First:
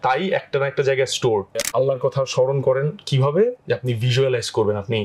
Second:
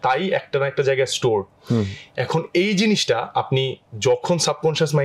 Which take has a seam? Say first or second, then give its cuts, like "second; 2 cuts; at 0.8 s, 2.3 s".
first; 1 cut; at 1.6 s